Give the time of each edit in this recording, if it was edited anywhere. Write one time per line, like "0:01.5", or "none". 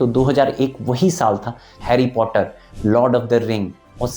0:01.8

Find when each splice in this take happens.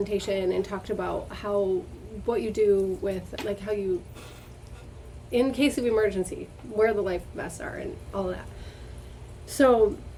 none

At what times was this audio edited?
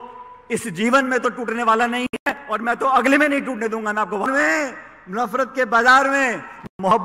0:04.3

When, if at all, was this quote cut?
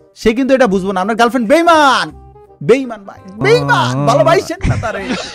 none

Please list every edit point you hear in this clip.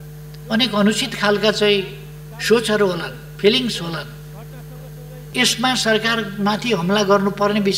0:05.3

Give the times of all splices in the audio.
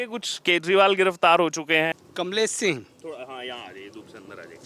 none

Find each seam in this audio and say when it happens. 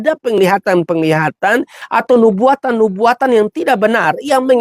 0:01.8

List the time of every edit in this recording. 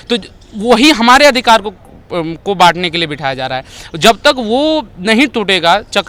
none

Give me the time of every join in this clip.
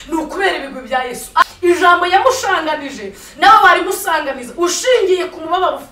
0:01.4

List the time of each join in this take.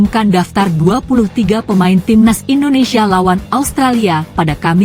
none

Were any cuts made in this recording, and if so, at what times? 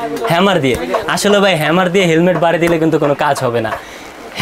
none

